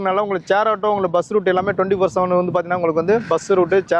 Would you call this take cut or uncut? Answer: uncut